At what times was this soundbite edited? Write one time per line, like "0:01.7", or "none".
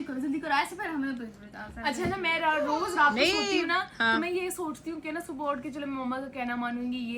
none